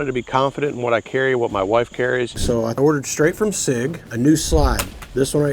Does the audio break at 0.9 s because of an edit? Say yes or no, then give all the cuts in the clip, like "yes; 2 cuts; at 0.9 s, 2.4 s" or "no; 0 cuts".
no; 2 cuts; at 2.3 s, 4.0 s